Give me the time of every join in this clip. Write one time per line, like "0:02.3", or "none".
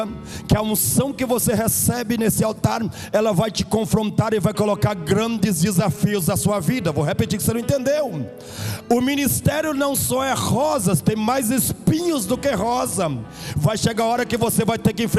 none